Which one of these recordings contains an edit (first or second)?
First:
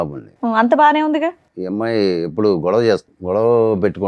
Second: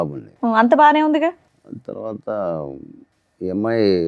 first